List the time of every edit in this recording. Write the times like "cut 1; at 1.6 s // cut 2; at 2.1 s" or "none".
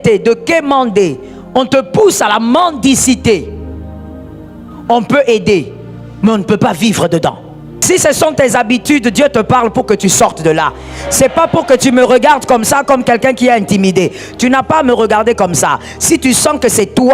cut 1; at 3.6 s // cut 2; at 4.9 s // cut 3; at 7.8 s